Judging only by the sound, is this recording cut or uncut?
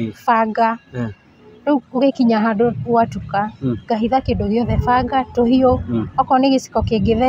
uncut